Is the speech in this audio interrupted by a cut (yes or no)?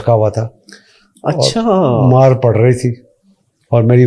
no